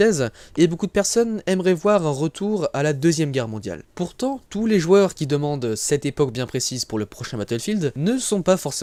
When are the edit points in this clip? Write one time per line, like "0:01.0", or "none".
none